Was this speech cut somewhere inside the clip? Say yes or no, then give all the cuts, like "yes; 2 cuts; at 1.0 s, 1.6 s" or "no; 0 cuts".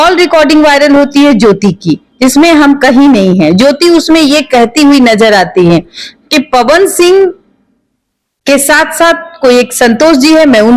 no; 0 cuts